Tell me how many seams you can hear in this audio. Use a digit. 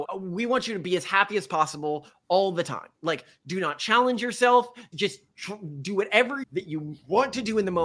1